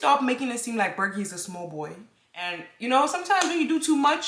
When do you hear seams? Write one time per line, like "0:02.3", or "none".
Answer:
0:02.6